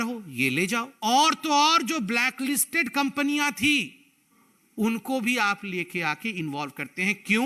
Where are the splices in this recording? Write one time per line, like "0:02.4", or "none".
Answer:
0:00.9